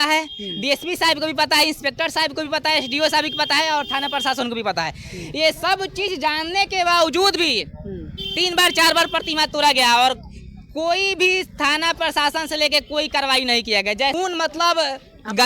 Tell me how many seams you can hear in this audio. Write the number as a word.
one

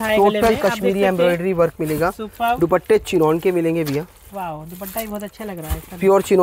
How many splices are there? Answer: zero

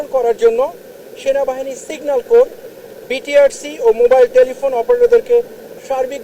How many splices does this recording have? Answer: zero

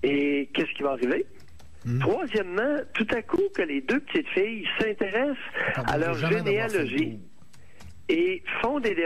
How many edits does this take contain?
one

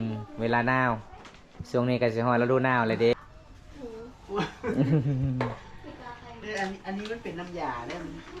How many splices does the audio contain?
one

